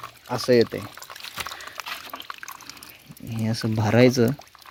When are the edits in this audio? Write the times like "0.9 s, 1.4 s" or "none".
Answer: none